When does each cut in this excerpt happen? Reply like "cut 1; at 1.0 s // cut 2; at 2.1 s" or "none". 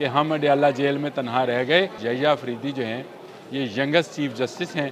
cut 1; at 2.0 s